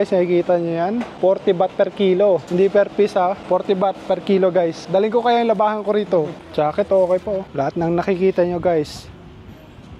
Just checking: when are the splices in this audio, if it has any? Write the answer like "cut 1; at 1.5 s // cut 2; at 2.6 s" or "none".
cut 1; at 6.3 s // cut 2; at 7.5 s